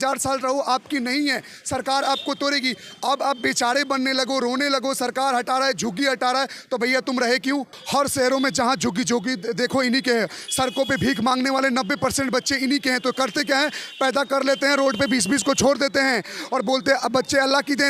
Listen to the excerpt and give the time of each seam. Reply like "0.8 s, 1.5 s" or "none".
7.8 s